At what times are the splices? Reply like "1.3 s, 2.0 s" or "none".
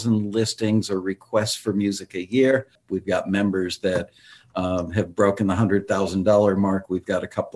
2.8 s